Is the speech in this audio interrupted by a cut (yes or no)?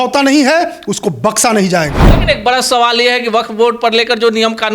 yes